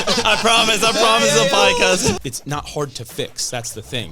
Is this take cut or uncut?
cut